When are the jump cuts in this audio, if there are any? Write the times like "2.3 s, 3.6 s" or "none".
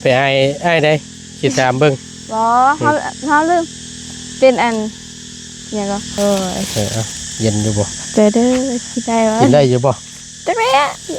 6.2 s